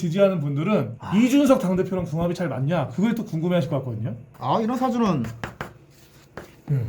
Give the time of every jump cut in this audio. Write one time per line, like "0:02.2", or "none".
0:04.2